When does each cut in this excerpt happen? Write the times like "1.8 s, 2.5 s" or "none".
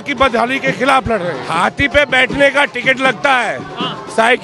1.4 s